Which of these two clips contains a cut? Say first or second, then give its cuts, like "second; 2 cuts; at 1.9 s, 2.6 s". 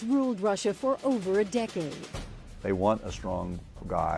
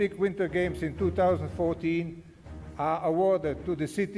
second; 1 cut; at 2.9 s